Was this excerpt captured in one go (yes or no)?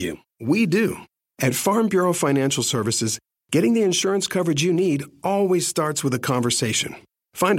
no